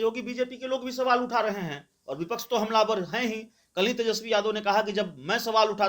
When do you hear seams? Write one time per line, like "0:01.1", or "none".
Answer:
none